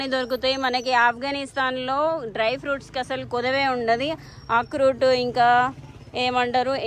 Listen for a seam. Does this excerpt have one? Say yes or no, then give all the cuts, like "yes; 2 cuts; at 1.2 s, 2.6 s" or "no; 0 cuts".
no; 0 cuts